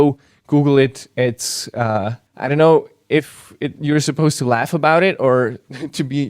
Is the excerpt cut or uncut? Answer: cut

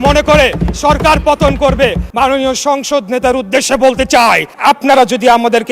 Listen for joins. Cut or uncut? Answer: cut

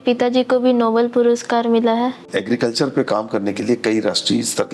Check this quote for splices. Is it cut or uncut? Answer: cut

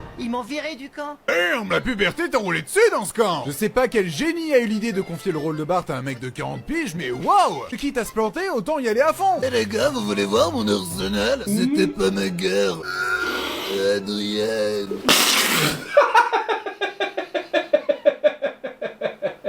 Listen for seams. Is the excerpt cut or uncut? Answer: cut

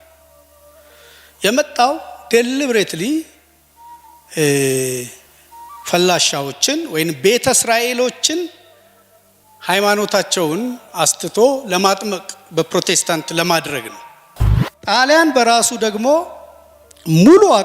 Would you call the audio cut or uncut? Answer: cut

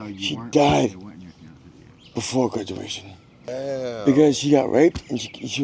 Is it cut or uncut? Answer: cut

